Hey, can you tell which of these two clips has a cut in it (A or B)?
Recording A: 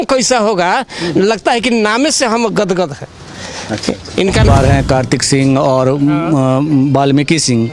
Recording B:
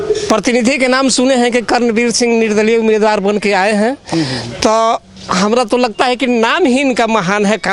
A